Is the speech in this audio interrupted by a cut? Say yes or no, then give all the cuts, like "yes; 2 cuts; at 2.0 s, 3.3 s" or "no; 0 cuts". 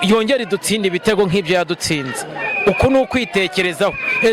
no; 0 cuts